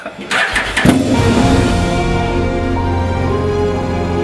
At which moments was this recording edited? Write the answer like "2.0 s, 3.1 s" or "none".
none